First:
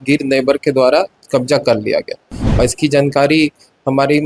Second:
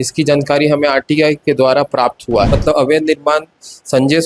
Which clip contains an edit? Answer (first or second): second